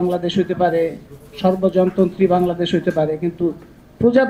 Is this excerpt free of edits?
yes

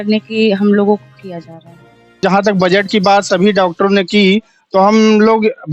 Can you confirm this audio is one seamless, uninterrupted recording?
no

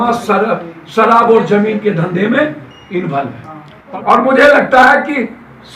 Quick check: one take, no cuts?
no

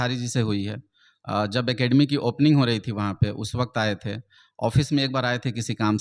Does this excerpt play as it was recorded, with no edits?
yes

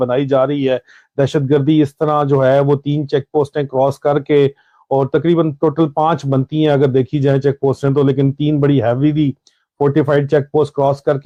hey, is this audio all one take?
yes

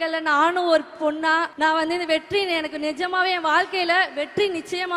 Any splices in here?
yes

